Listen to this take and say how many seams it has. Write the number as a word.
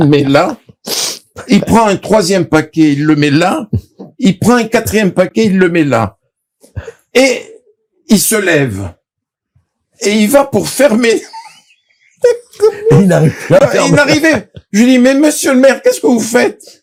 zero